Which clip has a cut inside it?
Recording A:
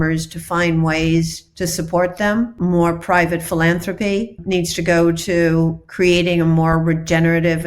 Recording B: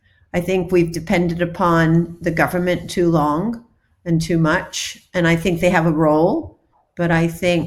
A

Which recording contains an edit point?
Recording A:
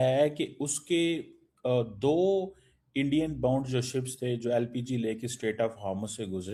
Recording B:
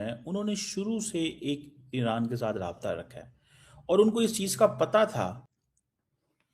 B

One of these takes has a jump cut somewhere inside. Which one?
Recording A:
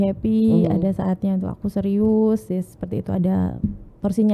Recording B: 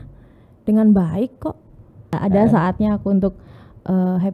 B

